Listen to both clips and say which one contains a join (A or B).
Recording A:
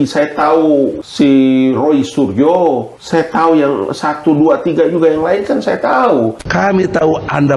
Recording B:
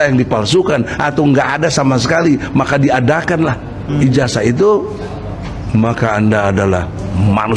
A